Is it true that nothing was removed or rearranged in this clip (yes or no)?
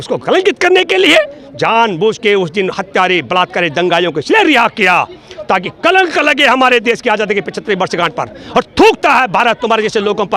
yes